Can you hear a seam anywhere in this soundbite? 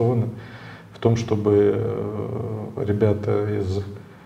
no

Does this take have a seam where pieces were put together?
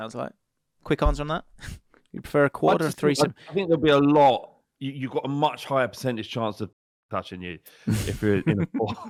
no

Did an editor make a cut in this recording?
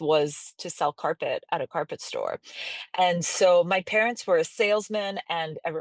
no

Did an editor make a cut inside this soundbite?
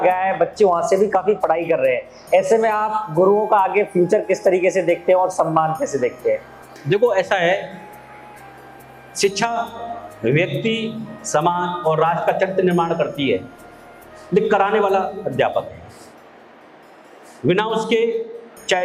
no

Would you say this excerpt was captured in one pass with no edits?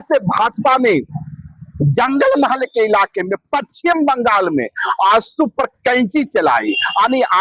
yes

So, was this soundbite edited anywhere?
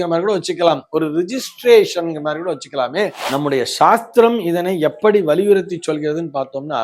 yes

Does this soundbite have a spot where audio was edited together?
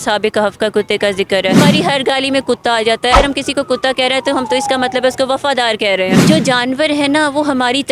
yes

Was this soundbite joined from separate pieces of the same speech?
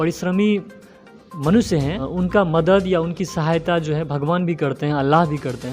yes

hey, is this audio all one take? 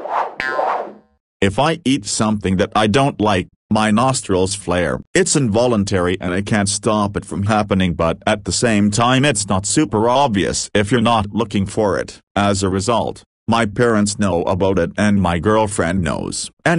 no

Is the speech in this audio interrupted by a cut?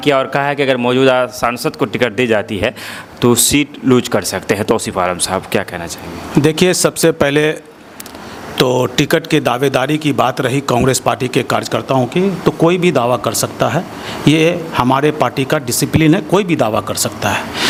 no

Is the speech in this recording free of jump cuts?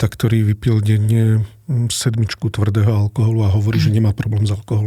yes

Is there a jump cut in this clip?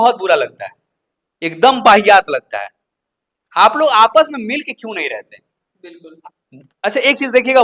no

